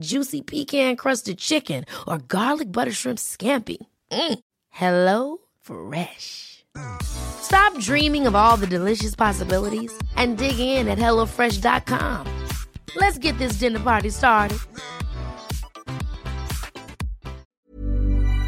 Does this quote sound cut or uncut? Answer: cut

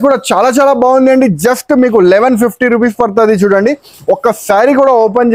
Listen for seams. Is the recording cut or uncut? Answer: uncut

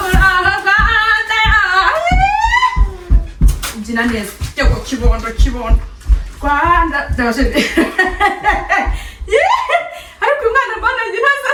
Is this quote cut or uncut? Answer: uncut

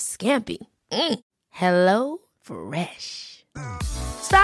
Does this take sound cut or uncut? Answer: uncut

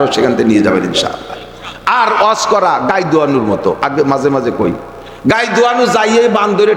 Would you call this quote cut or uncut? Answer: uncut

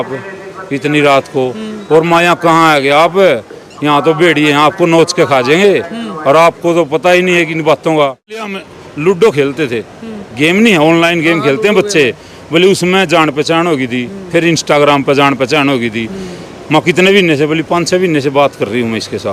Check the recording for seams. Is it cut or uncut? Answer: cut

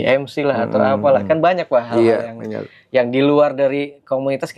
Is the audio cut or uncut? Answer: uncut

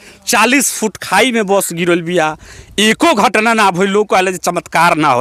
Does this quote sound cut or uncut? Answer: uncut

